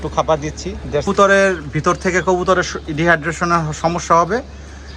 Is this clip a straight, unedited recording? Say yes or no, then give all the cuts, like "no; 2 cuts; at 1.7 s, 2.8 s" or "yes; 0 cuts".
no; 1 cut; at 1.0 s